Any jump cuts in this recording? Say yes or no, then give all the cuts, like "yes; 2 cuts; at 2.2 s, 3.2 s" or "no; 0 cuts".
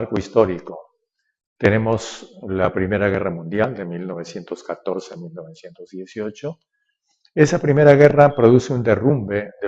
yes; 1 cut; at 2.6 s